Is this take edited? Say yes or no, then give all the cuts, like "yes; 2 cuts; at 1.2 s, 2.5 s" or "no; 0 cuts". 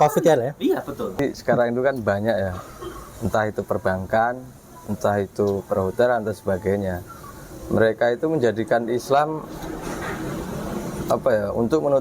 yes; 1 cut; at 1.2 s